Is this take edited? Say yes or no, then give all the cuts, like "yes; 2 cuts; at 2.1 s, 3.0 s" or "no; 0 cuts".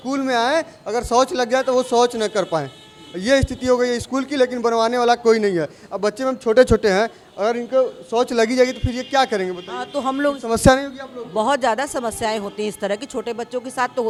no; 0 cuts